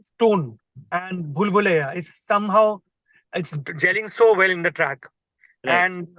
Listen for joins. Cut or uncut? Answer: uncut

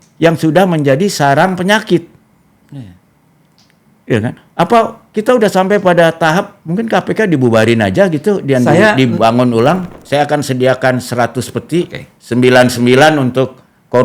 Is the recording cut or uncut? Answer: cut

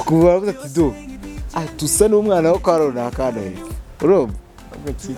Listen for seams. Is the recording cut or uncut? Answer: uncut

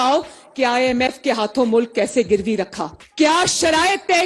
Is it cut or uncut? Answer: uncut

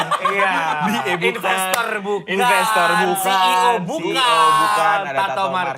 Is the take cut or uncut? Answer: uncut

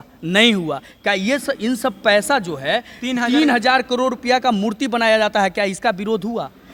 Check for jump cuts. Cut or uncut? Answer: uncut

